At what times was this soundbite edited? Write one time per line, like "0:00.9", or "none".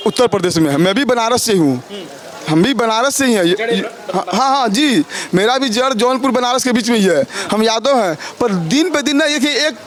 none